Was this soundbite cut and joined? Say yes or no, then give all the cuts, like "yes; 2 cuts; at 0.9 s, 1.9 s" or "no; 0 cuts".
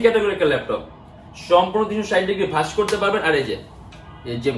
no; 0 cuts